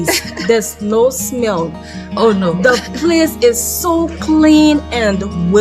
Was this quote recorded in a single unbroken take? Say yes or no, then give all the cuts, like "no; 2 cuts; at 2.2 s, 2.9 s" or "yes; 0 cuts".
yes; 0 cuts